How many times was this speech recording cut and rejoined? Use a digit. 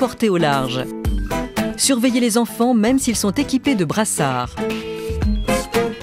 3